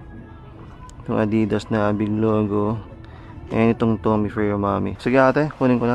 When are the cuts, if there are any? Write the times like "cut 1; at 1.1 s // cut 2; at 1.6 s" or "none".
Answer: cut 1; at 4.9 s